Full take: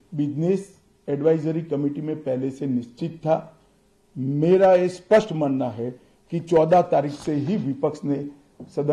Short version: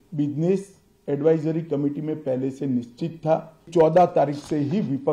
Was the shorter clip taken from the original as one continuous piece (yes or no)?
no